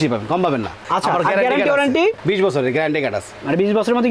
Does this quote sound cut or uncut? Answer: cut